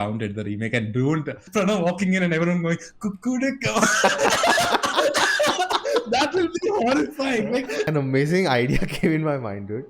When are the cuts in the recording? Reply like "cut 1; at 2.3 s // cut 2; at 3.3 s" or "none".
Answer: cut 1; at 1.4 s // cut 2; at 7.9 s